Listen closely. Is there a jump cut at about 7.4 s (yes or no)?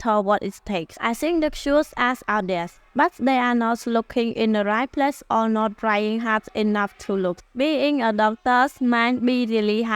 yes